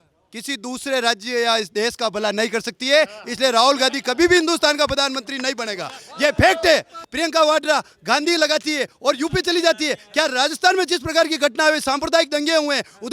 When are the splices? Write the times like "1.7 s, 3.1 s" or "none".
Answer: 7.0 s